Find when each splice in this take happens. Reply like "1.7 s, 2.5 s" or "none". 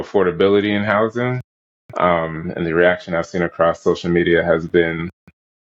none